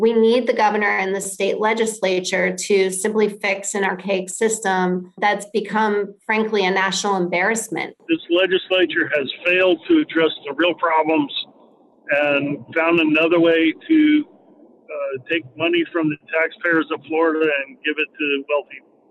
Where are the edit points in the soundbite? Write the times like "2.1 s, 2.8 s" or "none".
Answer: 5.2 s, 8.0 s